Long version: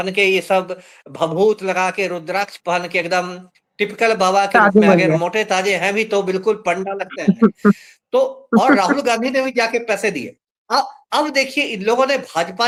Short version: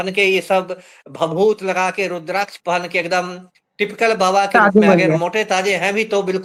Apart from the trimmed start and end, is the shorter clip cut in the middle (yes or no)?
no